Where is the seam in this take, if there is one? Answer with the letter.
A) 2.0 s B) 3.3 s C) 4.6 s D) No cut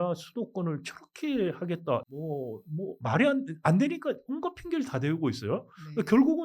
A